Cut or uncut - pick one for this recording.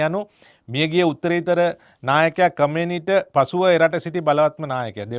uncut